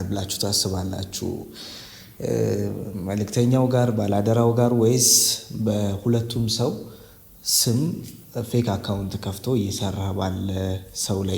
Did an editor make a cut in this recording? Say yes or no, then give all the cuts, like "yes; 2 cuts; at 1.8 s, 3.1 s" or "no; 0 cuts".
no; 0 cuts